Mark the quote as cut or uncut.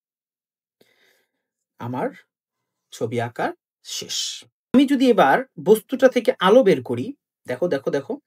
cut